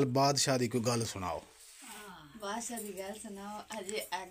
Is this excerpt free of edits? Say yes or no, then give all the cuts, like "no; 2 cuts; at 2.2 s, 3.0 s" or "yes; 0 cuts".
yes; 0 cuts